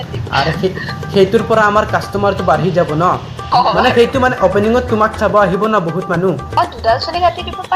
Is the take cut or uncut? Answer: cut